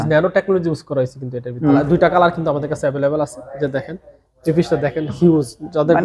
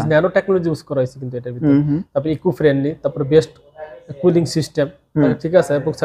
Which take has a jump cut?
first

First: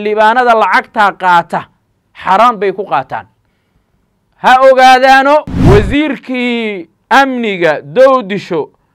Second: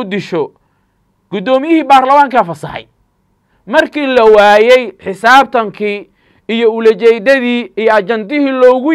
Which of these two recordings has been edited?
first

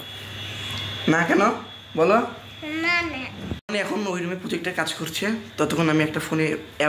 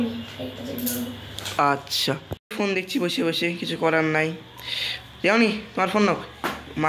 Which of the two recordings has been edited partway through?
first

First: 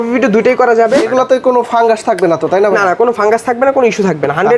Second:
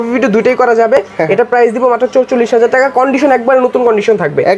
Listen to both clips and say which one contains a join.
first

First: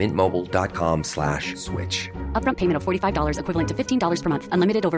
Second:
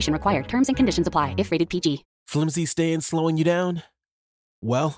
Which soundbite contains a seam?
second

